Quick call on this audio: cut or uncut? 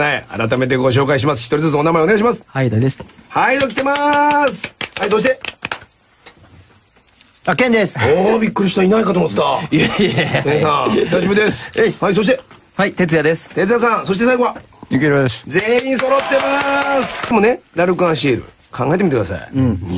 uncut